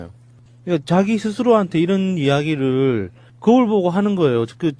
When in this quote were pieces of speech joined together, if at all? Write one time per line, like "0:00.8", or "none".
none